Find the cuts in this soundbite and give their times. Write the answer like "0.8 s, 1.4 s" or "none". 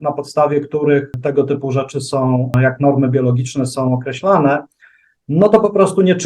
1.1 s, 2.5 s